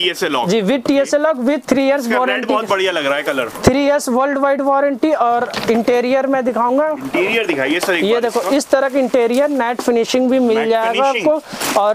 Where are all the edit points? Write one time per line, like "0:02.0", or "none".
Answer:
none

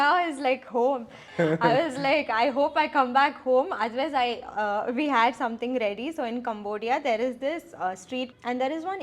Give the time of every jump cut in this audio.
0:01.2
0:08.3

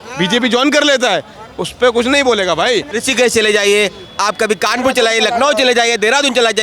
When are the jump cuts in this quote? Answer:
0:02.9

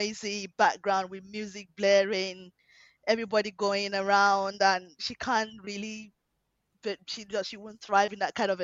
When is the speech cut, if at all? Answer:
none

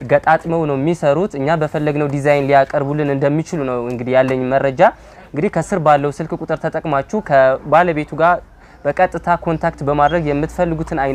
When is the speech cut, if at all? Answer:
none

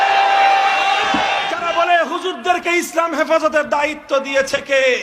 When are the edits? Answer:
0:01.5

